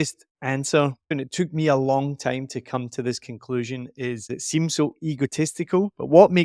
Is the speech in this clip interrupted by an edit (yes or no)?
yes